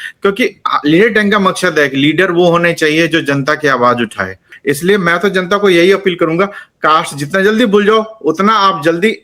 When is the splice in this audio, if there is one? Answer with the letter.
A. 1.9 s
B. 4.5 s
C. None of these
B